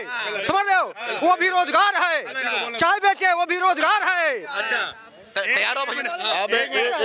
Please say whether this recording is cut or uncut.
uncut